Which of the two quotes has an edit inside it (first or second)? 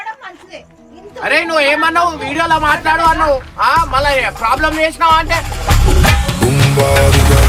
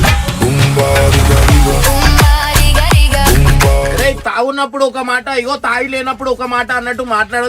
second